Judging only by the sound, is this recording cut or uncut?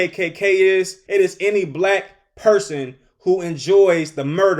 cut